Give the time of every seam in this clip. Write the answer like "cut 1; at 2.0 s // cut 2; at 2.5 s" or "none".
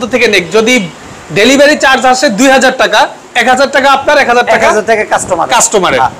none